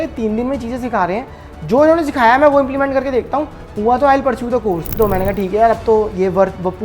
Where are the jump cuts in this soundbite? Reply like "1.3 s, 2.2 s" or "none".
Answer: 4.9 s